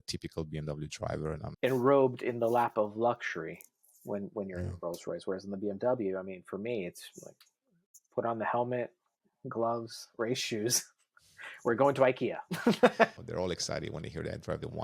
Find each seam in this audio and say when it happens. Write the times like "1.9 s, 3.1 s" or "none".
1.5 s, 13.1 s